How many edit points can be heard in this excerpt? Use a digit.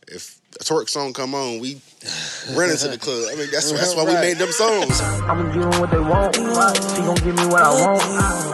1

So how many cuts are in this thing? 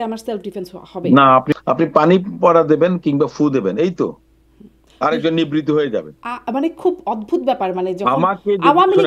1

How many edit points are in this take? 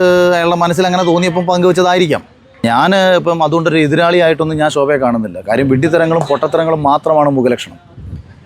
1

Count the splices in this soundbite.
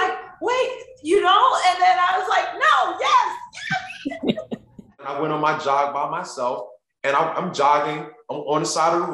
1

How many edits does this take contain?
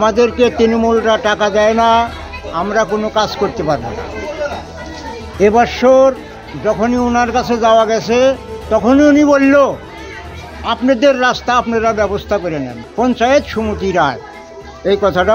1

